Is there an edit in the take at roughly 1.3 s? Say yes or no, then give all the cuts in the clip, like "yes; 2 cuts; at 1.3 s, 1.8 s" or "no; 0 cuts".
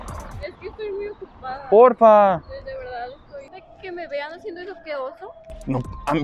no; 1 cut; at 3.5 s